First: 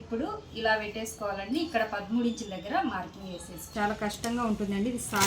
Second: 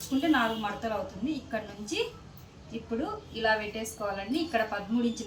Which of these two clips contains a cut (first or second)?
first